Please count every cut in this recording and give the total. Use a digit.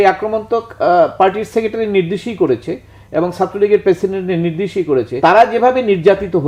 1